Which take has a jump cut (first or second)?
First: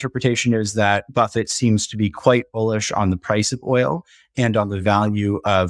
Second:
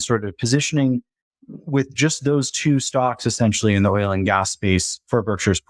first